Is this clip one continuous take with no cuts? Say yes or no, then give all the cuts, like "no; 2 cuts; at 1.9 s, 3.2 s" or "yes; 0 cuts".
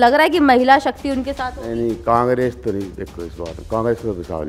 yes; 0 cuts